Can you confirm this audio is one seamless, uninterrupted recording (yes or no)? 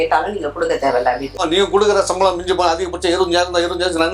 no